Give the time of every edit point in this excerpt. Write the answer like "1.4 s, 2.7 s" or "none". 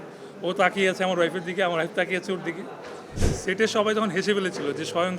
3.1 s